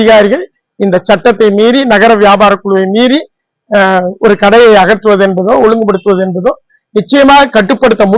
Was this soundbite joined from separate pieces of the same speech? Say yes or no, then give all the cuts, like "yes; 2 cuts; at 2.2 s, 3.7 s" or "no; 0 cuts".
no; 0 cuts